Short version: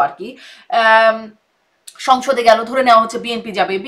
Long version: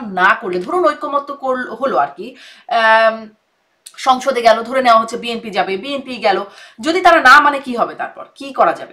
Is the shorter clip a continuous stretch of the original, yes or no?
yes